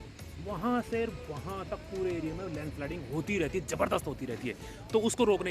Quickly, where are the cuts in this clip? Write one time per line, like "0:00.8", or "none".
none